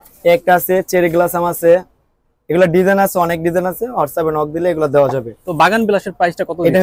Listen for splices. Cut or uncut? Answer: uncut